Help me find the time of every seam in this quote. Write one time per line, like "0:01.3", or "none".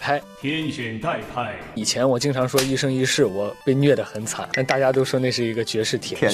0:01.8
0:04.4